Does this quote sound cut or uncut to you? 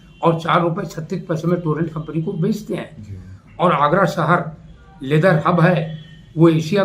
uncut